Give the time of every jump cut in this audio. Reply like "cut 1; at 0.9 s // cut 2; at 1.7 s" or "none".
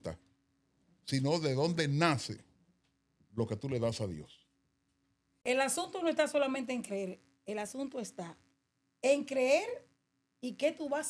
cut 1; at 5.4 s